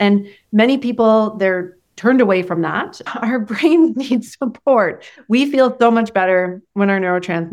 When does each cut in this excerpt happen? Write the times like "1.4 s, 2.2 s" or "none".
3.0 s, 5.1 s